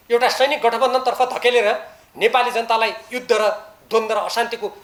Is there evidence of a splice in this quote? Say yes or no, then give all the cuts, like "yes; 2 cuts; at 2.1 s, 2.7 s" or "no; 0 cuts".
no; 0 cuts